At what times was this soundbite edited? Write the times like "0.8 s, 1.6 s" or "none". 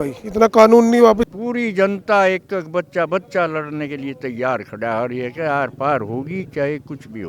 1.2 s